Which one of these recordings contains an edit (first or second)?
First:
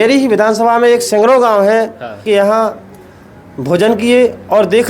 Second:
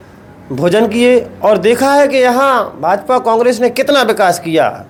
first